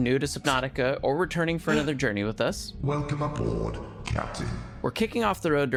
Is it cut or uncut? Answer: uncut